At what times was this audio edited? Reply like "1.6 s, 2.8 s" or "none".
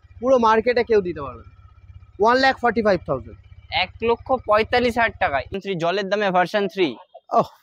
5.5 s